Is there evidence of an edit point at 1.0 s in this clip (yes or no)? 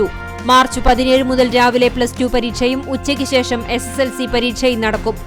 no